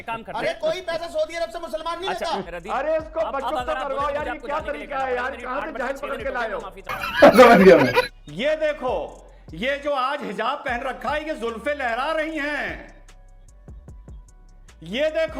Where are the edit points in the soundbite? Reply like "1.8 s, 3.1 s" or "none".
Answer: 2.5 s, 8.0 s